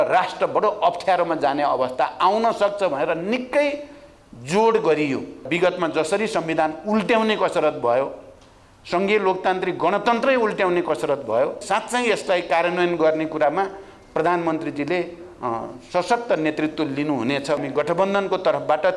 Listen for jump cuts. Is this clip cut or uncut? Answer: cut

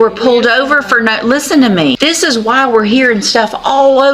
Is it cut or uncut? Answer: cut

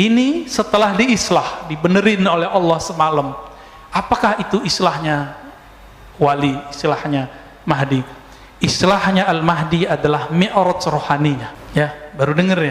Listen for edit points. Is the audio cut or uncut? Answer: cut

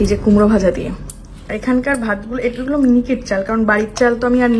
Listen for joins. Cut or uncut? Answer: uncut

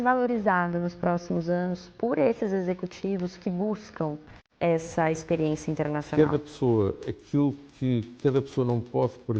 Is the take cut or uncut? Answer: cut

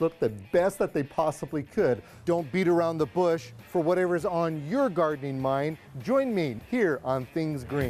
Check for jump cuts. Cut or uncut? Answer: cut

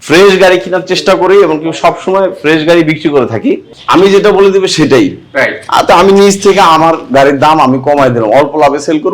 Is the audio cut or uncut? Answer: cut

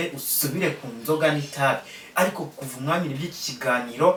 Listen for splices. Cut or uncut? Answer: uncut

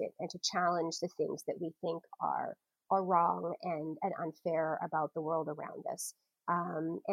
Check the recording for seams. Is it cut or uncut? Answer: uncut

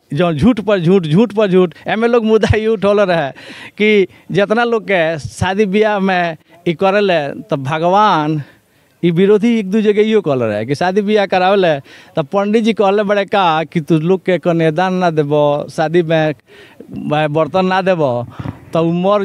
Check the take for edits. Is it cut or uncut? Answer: uncut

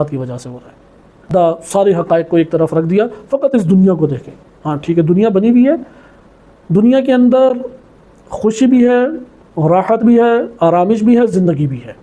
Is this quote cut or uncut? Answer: cut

